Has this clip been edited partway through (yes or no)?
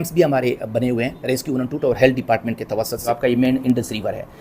yes